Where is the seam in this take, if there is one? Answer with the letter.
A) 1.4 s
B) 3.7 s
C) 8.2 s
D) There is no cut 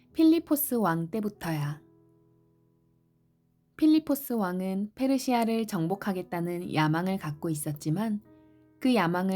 D